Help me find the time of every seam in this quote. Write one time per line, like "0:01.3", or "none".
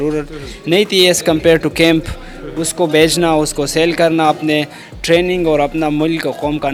none